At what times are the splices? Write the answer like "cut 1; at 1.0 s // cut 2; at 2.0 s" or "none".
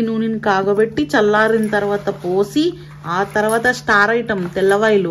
none